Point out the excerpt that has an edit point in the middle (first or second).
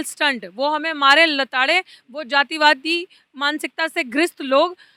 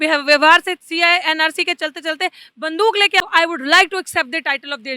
second